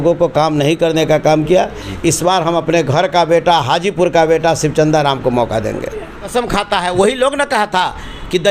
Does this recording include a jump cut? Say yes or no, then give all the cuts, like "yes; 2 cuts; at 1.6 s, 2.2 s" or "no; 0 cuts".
yes; 2 cuts; at 1.8 s, 6.3 s